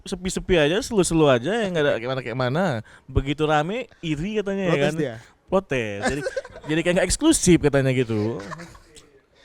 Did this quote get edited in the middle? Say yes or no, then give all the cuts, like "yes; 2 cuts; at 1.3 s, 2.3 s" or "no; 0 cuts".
no; 0 cuts